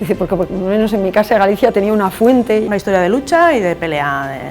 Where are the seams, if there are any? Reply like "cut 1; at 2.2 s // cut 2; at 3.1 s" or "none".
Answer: cut 1; at 2.7 s

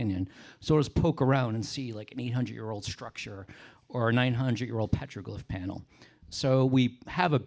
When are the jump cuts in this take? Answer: none

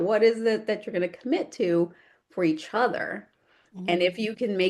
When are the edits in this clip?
none

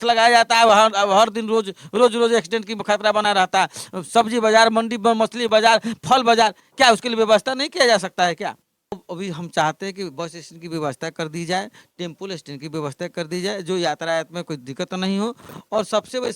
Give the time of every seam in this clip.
cut 1; at 9.0 s

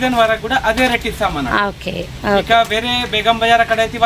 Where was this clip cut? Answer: none

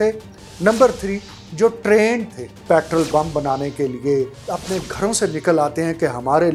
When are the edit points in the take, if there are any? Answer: cut 1; at 2.5 s // cut 2; at 4.4 s

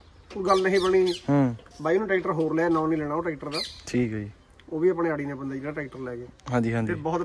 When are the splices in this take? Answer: none

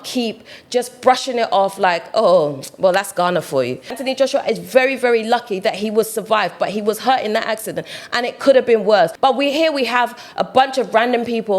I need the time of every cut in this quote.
cut 1; at 4.0 s // cut 2; at 9.1 s

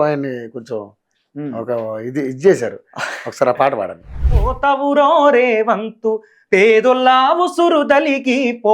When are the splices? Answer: cut 1; at 4.5 s

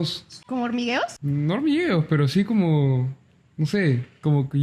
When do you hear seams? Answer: cut 1; at 1.2 s

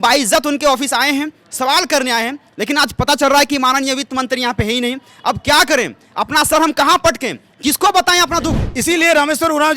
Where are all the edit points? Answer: cut 1; at 8.7 s

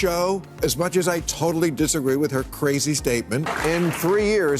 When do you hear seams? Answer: cut 1; at 3.4 s

